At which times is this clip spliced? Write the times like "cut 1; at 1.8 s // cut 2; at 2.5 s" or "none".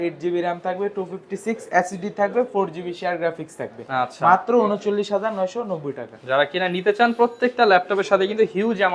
none